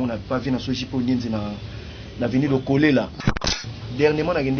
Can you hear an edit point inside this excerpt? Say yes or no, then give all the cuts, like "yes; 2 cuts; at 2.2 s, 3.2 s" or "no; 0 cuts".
yes; 1 cut; at 3.5 s